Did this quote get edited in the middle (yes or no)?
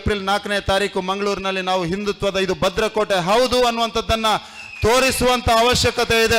no